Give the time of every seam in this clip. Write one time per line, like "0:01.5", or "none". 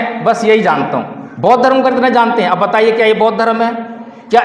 none